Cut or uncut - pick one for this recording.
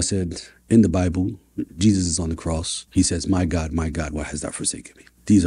uncut